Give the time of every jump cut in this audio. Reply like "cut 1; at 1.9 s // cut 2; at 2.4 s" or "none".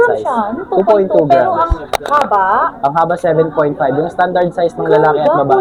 none